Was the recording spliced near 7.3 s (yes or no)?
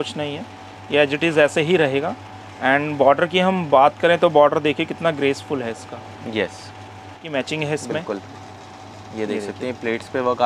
yes